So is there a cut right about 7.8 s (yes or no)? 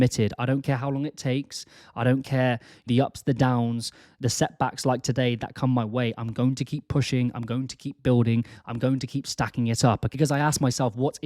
no